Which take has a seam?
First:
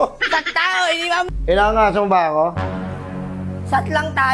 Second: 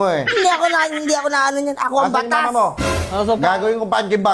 first; 1 cut; at 1.3 s

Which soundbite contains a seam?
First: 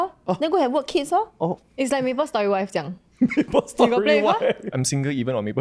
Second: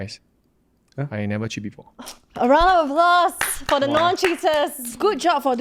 first; 1 cut; at 4.7 s

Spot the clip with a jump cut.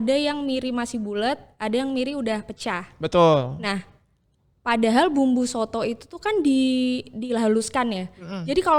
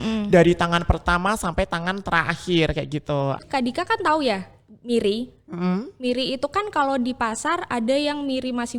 second; 1 cut; at 3.4 s

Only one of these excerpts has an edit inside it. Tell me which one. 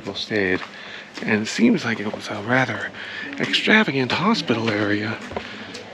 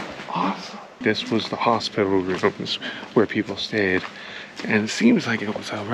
second; 1 cut; at 0.9 s

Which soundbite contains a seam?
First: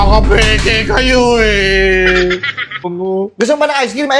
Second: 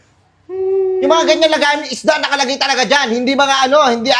first; 1 cut; at 2.9 s

